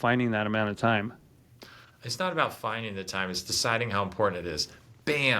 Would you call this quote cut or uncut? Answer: uncut